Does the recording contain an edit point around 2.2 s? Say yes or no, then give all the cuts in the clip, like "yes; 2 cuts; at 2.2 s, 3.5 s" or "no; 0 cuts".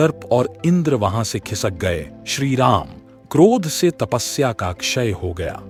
no; 0 cuts